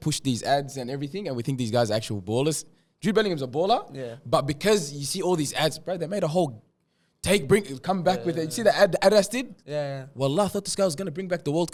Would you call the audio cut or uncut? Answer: uncut